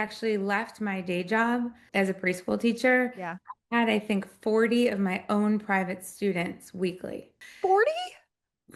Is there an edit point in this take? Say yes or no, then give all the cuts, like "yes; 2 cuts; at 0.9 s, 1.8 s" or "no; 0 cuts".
yes; 1 cut; at 7.4 s